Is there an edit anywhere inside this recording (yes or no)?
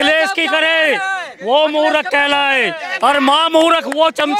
no